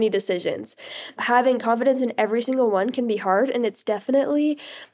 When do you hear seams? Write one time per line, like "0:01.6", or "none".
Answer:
0:01.2